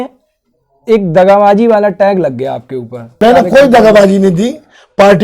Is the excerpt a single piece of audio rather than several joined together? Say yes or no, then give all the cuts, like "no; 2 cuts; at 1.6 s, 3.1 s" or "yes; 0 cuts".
no; 1 cut; at 3.1 s